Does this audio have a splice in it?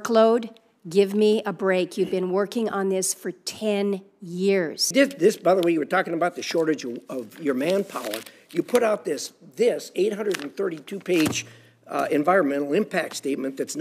yes; 1 cut; at 4.9 s

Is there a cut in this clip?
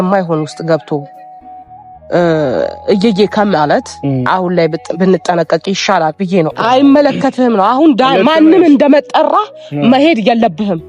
yes; 1 cut; at 6.6 s

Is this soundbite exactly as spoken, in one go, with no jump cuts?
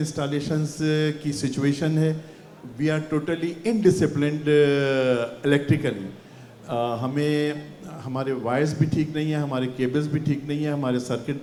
yes; 0 cuts

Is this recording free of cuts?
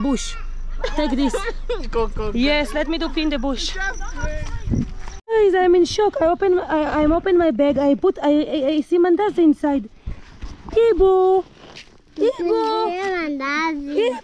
no; 1 cut; at 5.1 s

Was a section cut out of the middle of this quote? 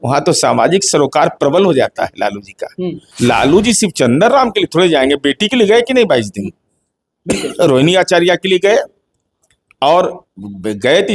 yes; 1 cut; at 3.0 s

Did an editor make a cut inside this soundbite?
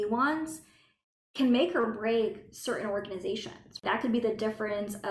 yes; 1 cut; at 3.8 s

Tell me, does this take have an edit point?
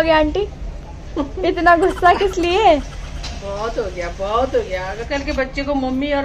yes; 1 cut; at 5.0 s

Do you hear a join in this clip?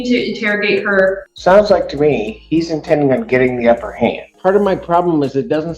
yes; 2 cuts; at 1.3 s, 4.3 s

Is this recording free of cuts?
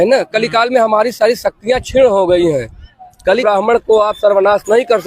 no; 1 cut; at 3.4 s

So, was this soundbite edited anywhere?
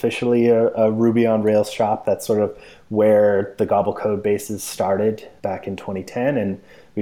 no; 0 cuts

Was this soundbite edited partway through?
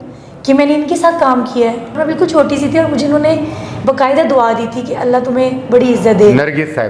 yes; 1 cut; at 2.0 s

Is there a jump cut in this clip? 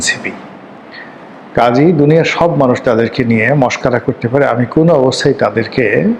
no; 0 cuts

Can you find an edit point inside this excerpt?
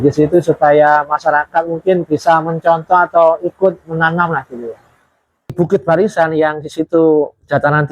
yes; 1 cut; at 5.6 s

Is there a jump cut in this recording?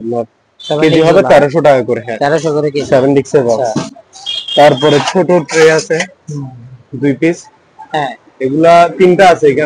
no; 0 cuts

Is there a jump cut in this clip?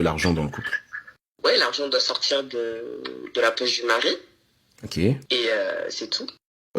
yes; 1 cut; at 4.8 s

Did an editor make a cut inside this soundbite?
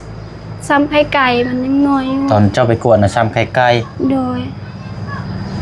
no; 0 cuts

